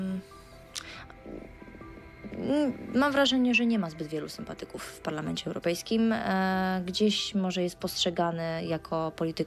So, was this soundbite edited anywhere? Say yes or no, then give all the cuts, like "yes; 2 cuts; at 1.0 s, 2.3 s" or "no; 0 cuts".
no; 0 cuts